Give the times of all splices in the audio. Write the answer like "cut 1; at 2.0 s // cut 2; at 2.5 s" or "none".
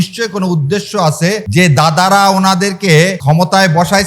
cut 1; at 1.4 s // cut 2; at 3.2 s